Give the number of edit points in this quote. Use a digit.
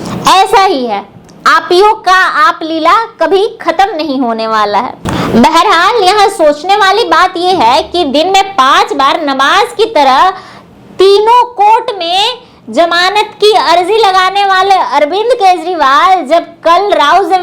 1